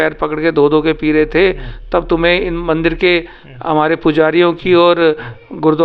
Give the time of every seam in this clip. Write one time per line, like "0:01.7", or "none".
none